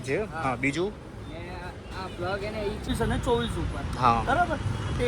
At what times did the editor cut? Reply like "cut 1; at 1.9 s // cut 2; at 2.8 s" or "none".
cut 1; at 2.9 s